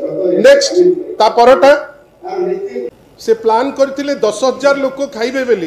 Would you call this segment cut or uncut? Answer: cut